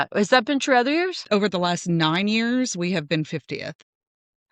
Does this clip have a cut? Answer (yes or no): yes